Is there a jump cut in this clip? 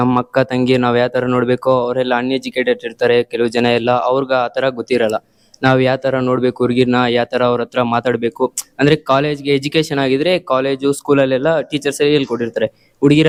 no; 0 cuts

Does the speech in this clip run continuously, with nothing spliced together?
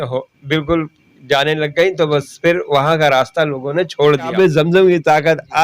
no; 1 cut; at 4.3 s

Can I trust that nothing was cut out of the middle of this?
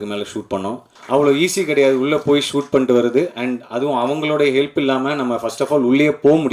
no; 1 cut; at 0.9 s

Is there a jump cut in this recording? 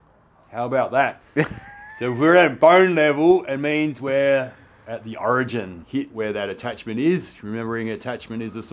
yes; 1 cut; at 5.8 s

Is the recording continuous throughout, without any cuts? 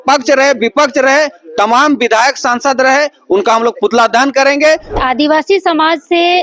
no; 1 cut; at 5.0 s

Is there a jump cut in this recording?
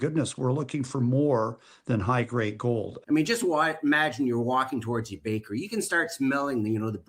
yes; 1 cut; at 3.0 s

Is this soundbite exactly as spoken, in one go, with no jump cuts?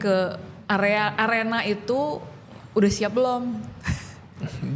yes; 0 cuts

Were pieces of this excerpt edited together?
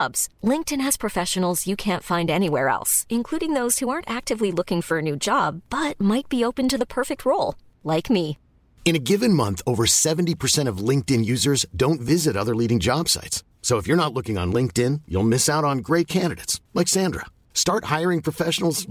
no; 0 cuts

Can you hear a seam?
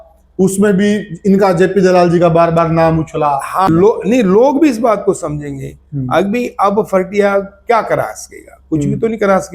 yes; 1 cut; at 3.7 s

